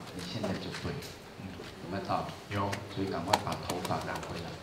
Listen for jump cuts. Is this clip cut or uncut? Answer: uncut